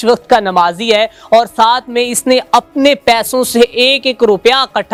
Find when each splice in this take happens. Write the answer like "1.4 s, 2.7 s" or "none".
none